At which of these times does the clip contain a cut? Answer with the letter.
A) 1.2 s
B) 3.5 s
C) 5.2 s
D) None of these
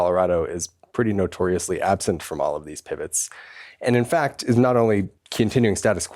C